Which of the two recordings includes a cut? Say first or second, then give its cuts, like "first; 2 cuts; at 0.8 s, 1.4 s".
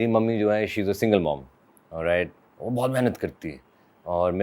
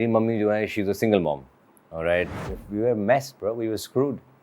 second; 1 cut; at 2.4 s